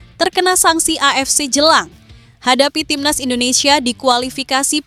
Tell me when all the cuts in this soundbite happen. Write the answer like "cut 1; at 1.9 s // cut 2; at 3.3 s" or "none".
none